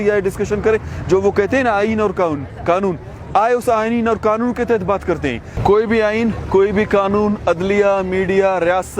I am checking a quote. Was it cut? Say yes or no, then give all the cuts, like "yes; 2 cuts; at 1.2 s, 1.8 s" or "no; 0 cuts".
yes; 1 cut; at 5.5 s